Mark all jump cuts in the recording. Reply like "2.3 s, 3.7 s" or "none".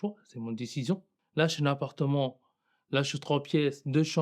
1.2 s